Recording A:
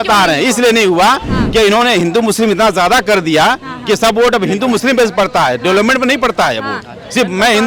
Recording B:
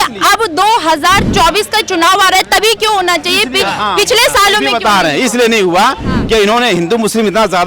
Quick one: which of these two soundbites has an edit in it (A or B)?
B